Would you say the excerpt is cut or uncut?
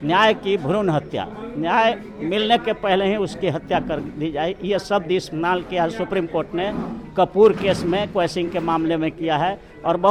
uncut